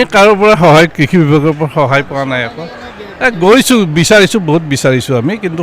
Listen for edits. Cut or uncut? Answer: uncut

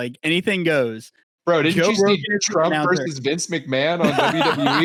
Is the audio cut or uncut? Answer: uncut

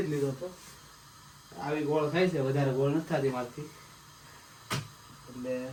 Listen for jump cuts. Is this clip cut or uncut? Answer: uncut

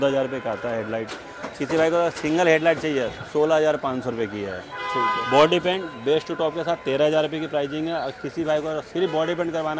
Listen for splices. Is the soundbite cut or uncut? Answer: uncut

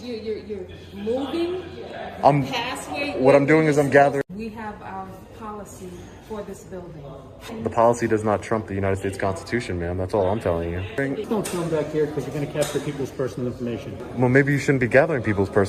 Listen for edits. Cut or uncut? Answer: cut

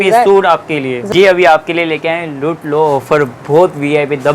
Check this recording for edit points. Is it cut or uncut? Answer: cut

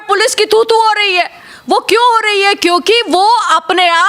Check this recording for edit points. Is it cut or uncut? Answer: uncut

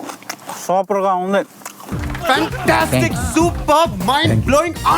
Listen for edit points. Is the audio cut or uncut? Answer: cut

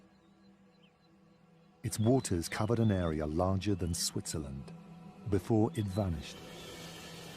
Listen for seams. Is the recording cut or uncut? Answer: cut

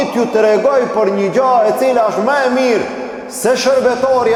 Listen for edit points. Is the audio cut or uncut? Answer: uncut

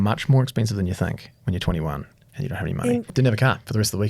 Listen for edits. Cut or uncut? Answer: cut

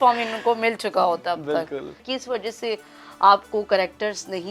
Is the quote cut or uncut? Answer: cut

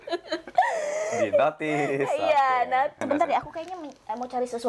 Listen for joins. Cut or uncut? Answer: cut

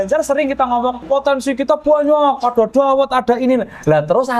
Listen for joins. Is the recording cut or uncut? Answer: cut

